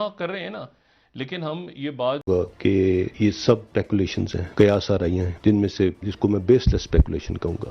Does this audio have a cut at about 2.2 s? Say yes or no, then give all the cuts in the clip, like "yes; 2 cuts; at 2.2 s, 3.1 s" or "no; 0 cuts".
yes; 1 cut; at 2.2 s